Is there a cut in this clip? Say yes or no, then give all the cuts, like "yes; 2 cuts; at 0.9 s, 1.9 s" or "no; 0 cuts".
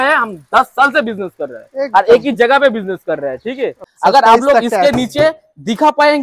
yes; 1 cut; at 3.8 s